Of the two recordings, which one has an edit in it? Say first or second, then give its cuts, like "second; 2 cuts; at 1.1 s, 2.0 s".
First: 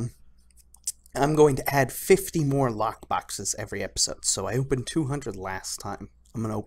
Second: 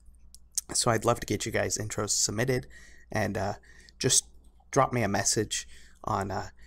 second; 1 cut; at 5.5 s